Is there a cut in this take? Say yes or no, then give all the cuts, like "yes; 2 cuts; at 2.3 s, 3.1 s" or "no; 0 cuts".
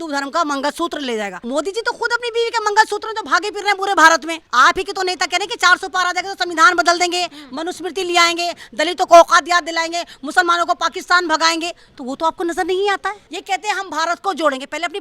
yes; 3 cuts; at 1.4 s, 4.4 s, 13.3 s